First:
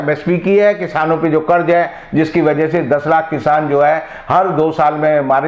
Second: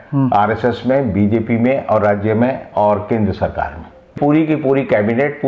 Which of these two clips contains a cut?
second; 1 cut; at 4.1 s

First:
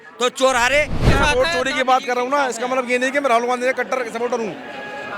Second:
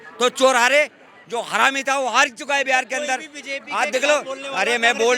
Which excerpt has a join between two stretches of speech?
first; 1 cut; at 1.0 s

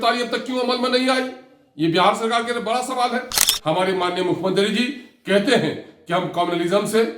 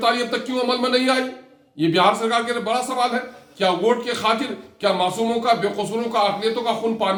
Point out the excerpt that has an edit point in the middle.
first; 1 cut; at 3.4 s

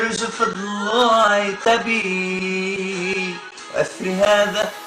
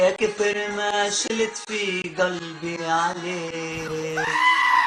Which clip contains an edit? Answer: second; 1 cut; at 3.8 s

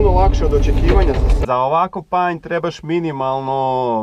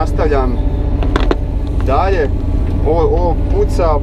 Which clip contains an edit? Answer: first; 1 cut; at 1.3 s

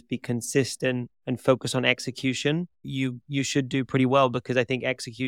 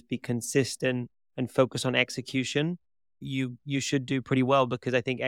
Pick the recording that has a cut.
first; 2 cuts; at 1.1 s, 2.8 s

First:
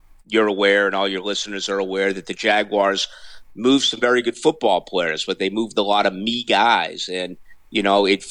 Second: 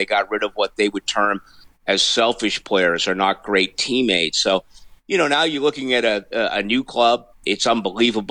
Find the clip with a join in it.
second; 1 cut; at 7.3 s

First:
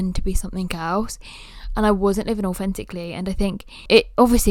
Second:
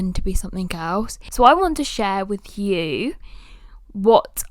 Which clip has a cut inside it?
second; 1 cut; at 1.2 s

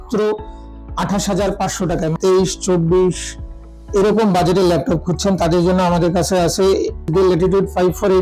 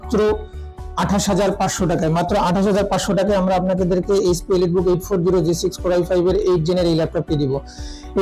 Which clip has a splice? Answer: first; 2 cuts; at 2.1 s, 7.1 s

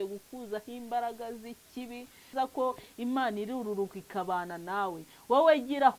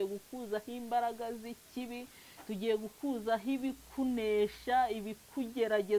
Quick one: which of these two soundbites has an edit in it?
first; 1 cut; at 2.3 s

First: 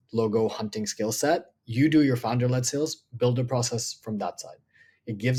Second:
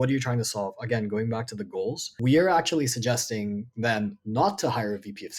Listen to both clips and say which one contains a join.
second; 1 cut; at 2.1 s

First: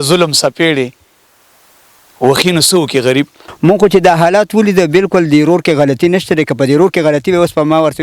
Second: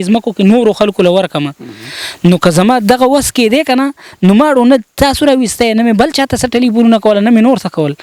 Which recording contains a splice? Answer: first; 1 cut; at 3.4 s

